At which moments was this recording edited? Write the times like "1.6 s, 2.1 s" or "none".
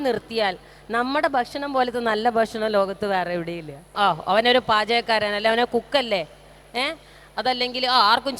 3.9 s